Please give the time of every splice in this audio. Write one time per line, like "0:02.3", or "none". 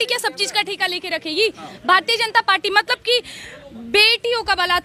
none